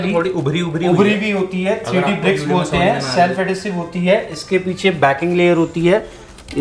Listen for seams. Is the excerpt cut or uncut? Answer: uncut